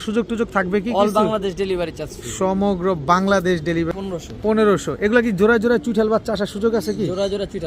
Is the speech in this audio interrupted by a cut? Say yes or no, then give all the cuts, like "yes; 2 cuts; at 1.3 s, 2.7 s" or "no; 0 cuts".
yes; 1 cut; at 3.9 s